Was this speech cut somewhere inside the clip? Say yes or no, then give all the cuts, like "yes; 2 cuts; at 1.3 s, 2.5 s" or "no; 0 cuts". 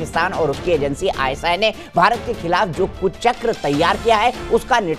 no; 0 cuts